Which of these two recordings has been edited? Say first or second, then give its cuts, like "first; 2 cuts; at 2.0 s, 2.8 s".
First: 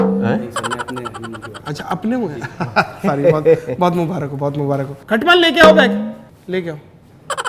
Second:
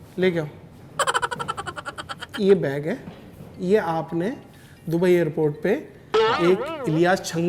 first; 1 cut; at 4.9 s